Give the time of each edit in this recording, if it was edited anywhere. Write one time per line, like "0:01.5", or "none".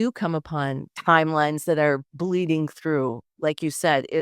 0:00.9